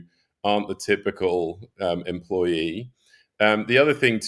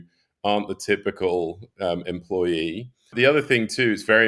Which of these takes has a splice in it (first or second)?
second